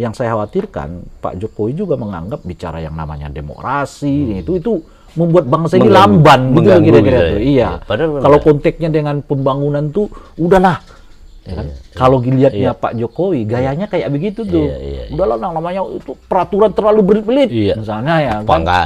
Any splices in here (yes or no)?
no